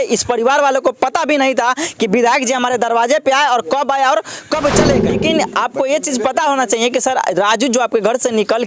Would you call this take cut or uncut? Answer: cut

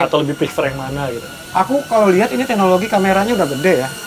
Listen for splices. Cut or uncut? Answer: uncut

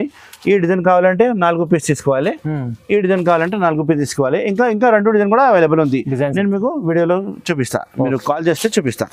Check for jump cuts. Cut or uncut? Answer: uncut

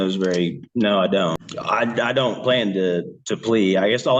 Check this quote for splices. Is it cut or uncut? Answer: cut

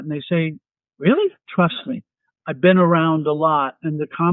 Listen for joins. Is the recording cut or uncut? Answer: cut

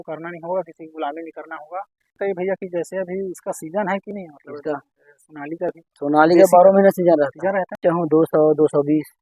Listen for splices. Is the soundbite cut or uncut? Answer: cut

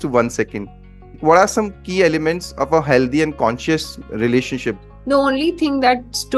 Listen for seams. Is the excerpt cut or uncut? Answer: cut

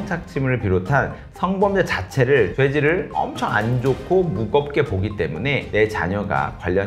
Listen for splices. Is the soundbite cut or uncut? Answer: uncut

